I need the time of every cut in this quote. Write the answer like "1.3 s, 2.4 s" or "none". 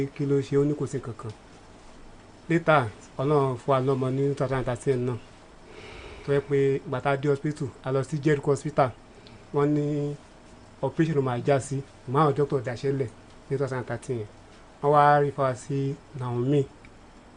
none